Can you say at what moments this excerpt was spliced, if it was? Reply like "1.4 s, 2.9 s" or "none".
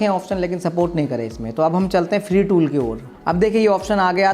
3.1 s